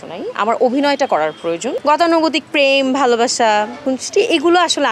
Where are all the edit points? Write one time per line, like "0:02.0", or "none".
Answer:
0:01.7